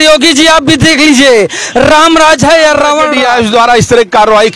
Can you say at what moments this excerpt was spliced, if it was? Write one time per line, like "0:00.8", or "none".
0:03.1